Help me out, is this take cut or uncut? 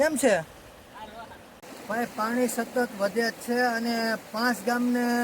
cut